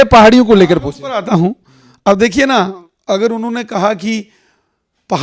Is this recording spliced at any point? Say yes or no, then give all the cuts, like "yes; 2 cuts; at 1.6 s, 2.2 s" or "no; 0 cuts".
no; 0 cuts